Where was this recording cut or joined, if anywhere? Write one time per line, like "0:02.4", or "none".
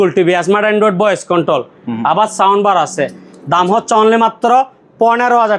none